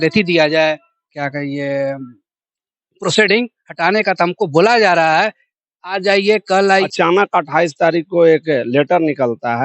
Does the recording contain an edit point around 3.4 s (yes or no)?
no